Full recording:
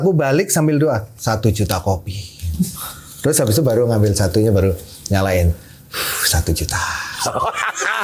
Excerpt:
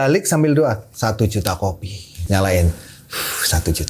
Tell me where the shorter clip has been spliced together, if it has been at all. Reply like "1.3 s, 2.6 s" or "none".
2.1 s